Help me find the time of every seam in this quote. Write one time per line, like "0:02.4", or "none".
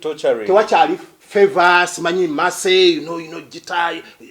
0:01.1